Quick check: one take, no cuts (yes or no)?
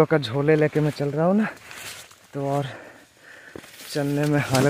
yes